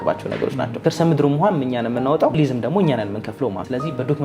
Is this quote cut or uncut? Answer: cut